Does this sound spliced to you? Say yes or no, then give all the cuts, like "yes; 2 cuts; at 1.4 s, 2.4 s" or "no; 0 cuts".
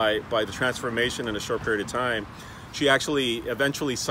no; 0 cuts